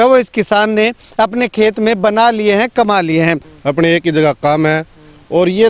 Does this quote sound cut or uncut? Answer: cut